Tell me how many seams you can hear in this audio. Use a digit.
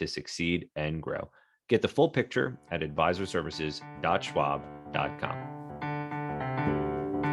1